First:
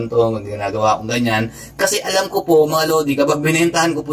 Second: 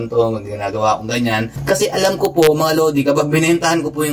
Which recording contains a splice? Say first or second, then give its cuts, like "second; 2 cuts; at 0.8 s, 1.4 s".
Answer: second; 1 cut; at 1.5 s